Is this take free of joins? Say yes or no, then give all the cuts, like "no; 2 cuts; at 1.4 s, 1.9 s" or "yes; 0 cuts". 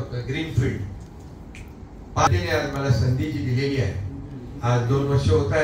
no; 1 cut; at 2.3 s